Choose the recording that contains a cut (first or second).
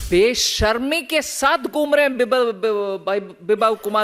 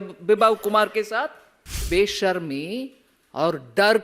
second